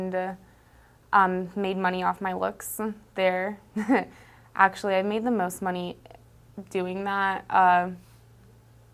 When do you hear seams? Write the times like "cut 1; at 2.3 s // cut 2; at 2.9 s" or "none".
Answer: none